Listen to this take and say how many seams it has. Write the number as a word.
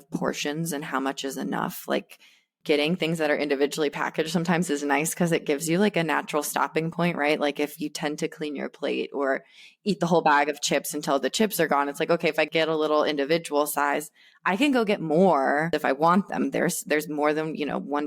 one